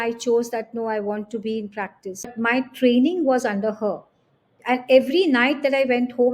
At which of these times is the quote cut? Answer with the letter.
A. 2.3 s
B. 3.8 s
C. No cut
A